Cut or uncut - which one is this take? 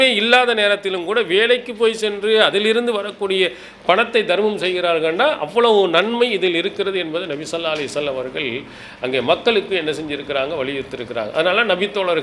uncut